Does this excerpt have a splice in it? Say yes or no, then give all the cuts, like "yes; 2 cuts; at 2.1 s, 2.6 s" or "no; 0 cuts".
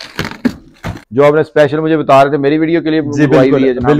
yes; 1 cut; at 1.0 s